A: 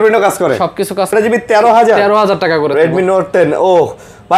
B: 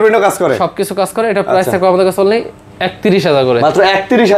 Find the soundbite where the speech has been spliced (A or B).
A